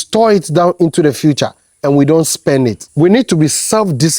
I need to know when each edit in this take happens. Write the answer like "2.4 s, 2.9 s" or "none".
2.8 s